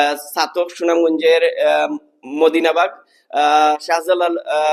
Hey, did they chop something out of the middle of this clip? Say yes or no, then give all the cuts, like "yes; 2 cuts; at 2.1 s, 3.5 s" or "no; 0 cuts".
no; 0 cuts